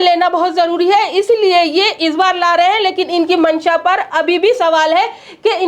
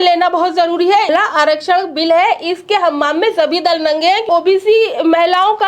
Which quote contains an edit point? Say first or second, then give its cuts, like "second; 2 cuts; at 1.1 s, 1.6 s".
second; 2 cuts; at 1.1 s, 4.3 s